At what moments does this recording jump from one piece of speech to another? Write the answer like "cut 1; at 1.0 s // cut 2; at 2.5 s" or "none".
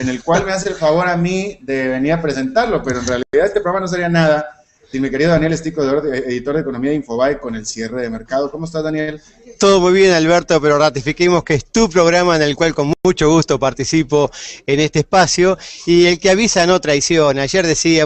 none